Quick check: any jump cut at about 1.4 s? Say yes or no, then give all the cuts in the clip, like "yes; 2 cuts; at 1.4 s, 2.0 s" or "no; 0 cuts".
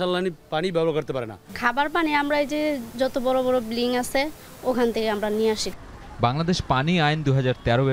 no; 0 cuts